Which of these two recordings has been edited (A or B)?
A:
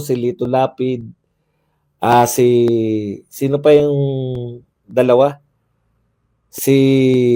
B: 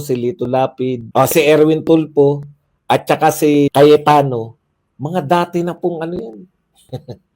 B